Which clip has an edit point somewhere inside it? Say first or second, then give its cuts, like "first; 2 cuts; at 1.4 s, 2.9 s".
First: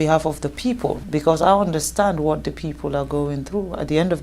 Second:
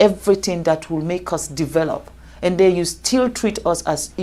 first; 1 cut; at 1.0 s